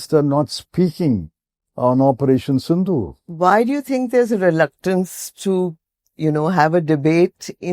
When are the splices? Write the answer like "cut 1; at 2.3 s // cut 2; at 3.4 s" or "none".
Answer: none